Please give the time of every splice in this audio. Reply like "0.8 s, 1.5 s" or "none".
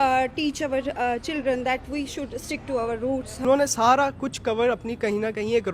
3.4 s